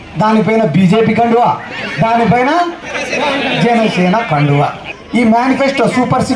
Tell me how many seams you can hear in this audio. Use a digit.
1